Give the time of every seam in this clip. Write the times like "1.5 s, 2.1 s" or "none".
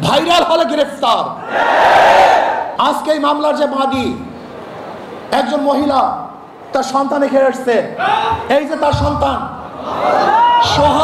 2.7 s